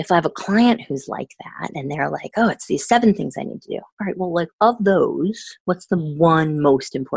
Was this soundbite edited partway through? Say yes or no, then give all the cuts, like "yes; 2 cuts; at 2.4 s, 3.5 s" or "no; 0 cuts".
no; 0 cuts